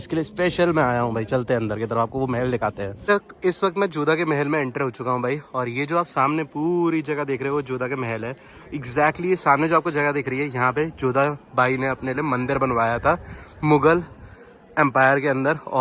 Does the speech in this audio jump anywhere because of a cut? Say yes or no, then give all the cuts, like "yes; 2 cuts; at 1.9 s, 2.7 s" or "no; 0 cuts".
no; 0 cuts